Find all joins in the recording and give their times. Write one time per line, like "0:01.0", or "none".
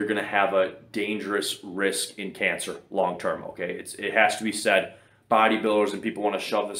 none